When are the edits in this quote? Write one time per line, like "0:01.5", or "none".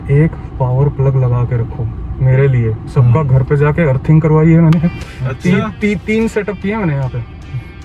none